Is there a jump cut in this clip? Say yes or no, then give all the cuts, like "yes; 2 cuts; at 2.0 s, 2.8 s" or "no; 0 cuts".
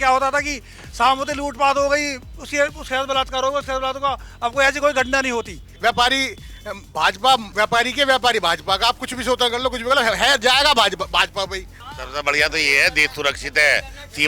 yes; 3 cuts; at 5.6 s, 7.5 s, 11.7 s